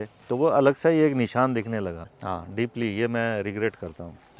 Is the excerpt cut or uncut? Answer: cut